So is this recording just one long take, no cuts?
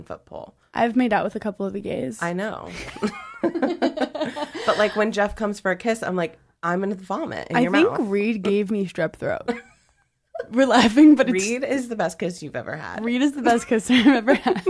yes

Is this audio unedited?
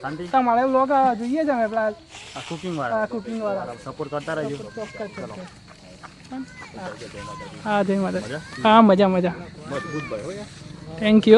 yes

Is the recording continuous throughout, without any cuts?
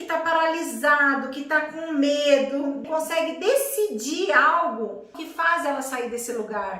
no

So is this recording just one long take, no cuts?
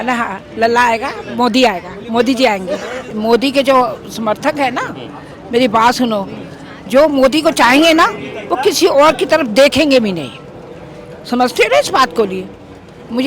no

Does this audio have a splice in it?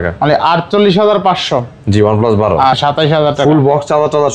yes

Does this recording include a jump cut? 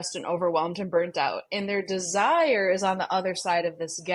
no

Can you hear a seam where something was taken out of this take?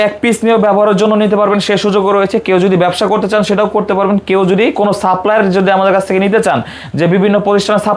no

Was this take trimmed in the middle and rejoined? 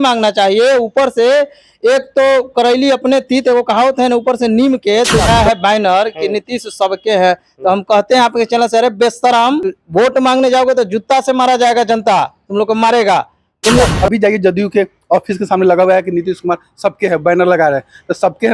yes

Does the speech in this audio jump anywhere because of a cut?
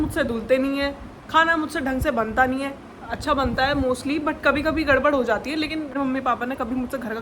yes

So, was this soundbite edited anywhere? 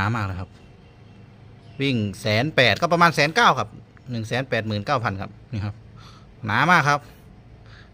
no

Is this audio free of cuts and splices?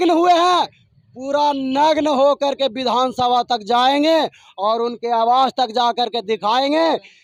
yes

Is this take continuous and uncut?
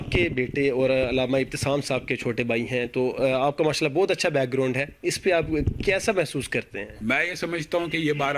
yes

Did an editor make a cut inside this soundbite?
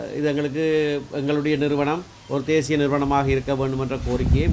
no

